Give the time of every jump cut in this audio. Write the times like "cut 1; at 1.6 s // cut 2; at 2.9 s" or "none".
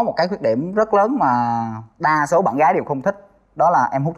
none